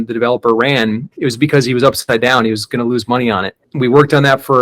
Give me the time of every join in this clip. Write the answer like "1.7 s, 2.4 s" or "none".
1.1 s, 3.6 s